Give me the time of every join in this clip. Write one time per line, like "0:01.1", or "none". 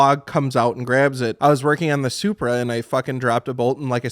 0:01.3